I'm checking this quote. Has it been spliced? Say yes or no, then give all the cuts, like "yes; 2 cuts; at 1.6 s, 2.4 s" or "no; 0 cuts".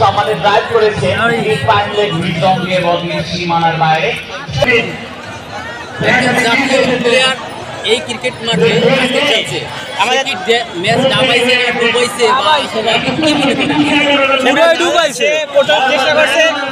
yes; 1 cut; at 4.7 s